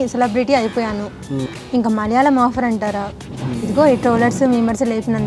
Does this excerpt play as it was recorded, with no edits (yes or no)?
no